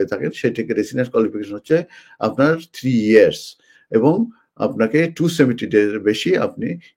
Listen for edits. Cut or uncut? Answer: uncut